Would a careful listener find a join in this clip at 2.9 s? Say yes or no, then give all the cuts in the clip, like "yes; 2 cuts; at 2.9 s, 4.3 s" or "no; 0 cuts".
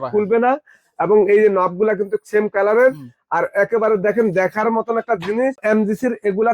no; 1 cut; at 5.6 s